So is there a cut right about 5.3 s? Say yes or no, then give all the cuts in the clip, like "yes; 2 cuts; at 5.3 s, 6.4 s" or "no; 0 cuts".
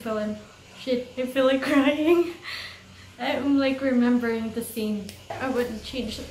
yes; 1 cut; at 5.3 s